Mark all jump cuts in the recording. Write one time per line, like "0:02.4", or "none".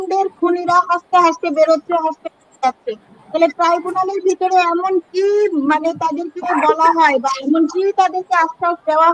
none